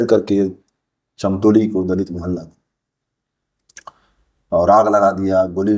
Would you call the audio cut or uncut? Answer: uncut